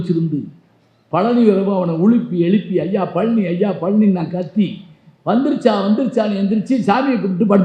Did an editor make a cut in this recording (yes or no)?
no